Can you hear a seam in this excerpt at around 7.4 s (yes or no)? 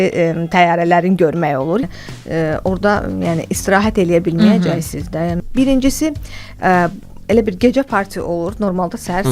no